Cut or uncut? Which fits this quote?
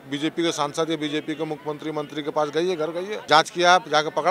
cut